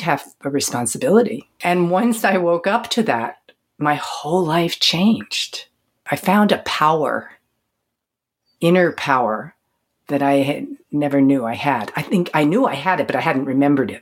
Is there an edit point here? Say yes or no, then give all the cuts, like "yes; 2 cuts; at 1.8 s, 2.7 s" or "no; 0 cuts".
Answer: yes; 2 cuts; at 1.5 s, 6.0 s